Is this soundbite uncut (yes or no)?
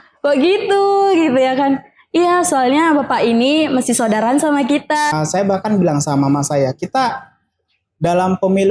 no